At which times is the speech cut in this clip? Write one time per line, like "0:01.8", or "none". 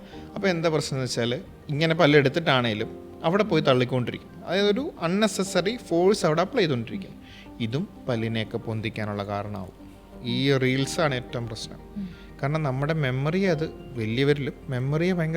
0:10.1